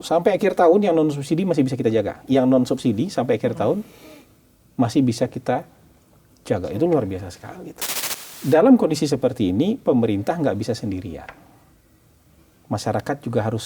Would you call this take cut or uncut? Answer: cut